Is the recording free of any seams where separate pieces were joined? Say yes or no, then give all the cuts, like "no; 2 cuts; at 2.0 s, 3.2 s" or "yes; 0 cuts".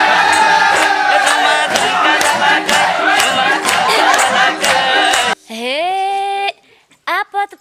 no; 1 cut; at 5.3 s